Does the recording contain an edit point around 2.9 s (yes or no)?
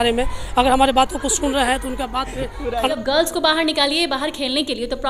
yes